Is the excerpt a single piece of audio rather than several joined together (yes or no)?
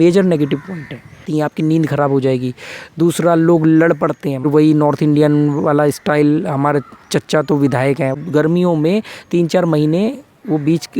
no